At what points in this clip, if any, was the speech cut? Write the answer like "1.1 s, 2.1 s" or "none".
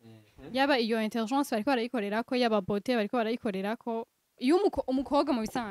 4.4 s

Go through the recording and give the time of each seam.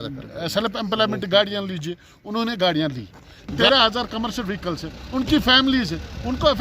3.6 s

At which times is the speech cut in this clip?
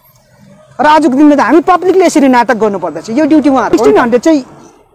3.7 s

